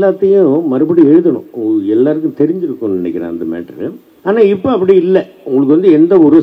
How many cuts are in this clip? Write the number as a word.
one